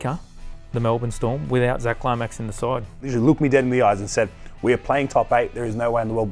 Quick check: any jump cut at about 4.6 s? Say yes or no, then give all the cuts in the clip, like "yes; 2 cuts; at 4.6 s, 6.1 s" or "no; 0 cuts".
no; 1 cut; at 3.0 s